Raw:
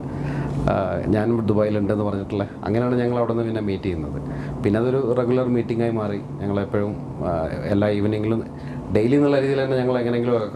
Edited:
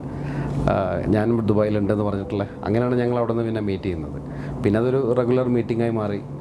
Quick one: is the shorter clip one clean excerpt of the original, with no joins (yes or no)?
yes